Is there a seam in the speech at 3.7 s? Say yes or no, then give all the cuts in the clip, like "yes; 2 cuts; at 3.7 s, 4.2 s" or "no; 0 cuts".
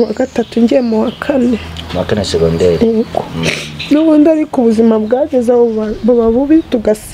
no; 0 cuts